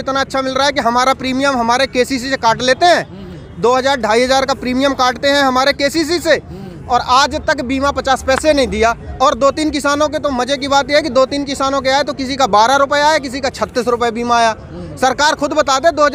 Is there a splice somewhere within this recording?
no; 0 cuts

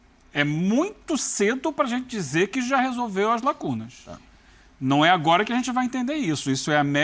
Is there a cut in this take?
no; 0 cuts

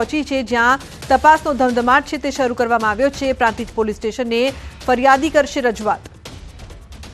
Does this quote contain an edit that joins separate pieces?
yes; 1 cut; at 3.3 s

